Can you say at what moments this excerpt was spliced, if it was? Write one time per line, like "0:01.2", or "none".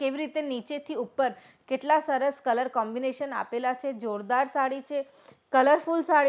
none

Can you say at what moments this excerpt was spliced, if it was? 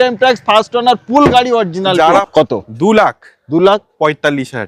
0:02.2

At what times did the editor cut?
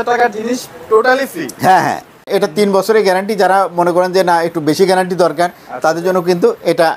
0:02.2

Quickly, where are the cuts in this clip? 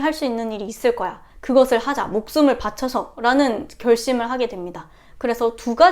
0:01.3

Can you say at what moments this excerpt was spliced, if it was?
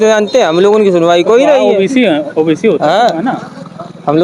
none

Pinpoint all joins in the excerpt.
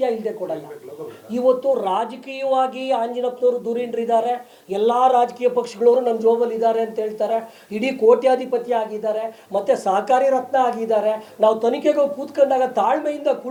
none

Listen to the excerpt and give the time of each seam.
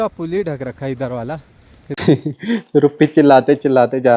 0:01.8

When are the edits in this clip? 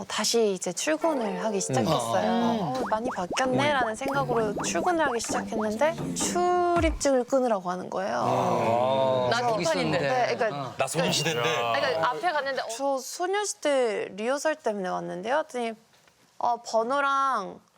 0:02.8
0:06.1
0:12.6

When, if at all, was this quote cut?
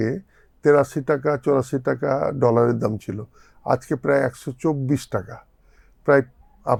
none

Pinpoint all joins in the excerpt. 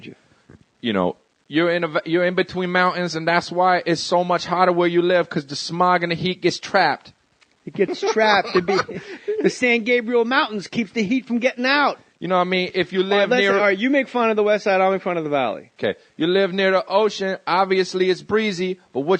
0:03.5

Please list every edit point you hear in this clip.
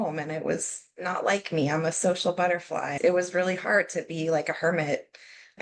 0:02.9

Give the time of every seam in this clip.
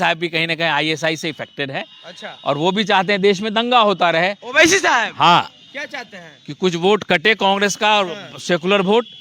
none

